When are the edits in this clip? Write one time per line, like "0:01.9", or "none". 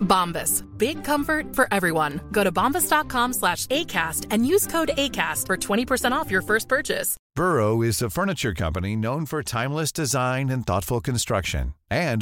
0:07.2